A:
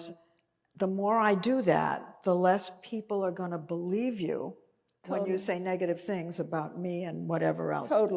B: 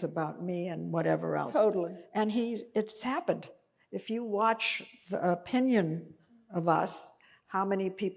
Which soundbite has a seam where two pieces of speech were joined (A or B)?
B